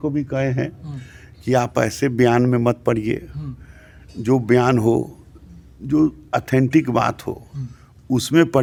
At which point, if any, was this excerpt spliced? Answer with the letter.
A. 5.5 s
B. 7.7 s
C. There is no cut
C